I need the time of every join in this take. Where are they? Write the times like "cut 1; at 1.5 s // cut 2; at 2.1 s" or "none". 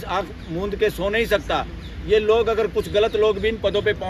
none